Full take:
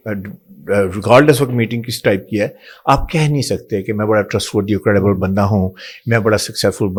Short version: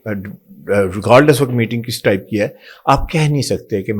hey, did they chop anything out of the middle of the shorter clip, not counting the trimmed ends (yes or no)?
no